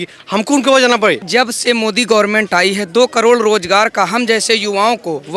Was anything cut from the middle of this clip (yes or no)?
yes